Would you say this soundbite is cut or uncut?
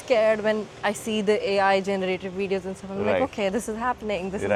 uncut